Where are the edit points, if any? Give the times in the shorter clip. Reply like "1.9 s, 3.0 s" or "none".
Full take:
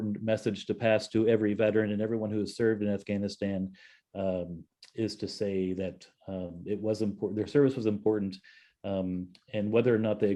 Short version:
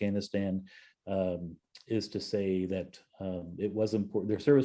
none